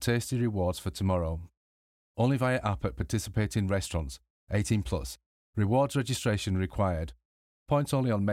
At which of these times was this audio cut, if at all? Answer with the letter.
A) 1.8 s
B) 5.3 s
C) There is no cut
C